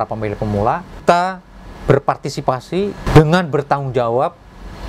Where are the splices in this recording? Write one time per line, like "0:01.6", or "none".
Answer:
0:01.0
0:03.0